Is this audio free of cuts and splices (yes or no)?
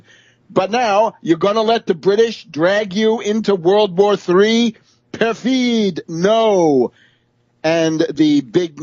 no